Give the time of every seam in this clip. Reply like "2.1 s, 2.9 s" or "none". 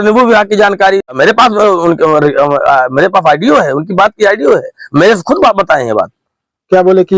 1.1 s